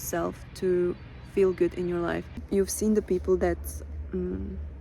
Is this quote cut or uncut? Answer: cut